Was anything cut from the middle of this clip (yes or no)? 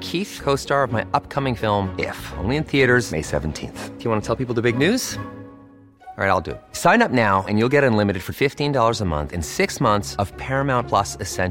no